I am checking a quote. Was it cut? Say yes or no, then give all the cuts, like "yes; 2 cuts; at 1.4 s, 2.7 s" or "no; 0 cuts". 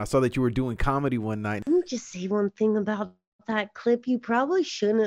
yes; 1 cut; at 1.6 s